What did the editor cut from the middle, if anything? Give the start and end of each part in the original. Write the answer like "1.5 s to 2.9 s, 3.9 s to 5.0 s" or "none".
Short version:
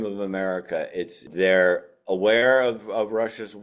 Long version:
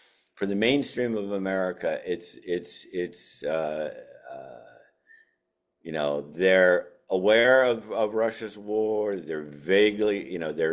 2.4 s to 6.3 s